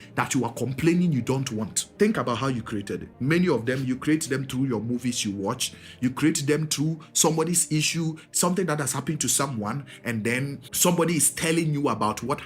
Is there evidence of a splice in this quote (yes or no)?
yes